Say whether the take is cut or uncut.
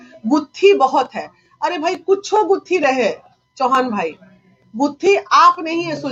uncut